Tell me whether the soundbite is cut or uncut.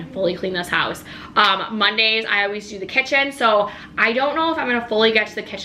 uncut